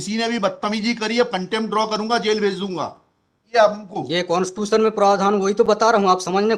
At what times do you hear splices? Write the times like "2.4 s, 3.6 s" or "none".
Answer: 3.5 s